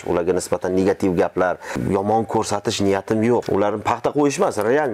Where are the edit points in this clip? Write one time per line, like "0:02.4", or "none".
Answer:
0:01.7
0:03.5